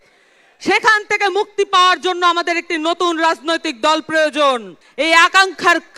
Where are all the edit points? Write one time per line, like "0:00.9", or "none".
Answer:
0:04.8